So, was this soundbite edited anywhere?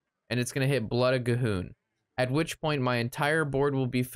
no; 0 cuts

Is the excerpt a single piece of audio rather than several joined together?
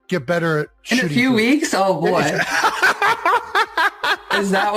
yes; 0 cuts

